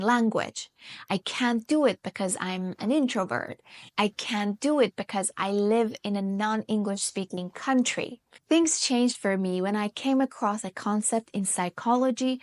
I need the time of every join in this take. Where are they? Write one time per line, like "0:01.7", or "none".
0:08.3